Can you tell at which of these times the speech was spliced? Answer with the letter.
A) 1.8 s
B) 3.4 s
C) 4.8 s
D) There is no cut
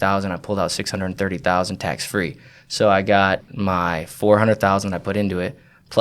B